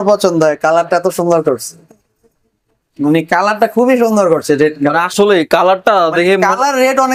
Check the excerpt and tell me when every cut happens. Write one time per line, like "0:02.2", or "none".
none